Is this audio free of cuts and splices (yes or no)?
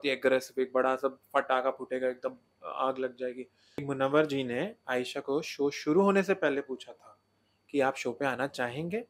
no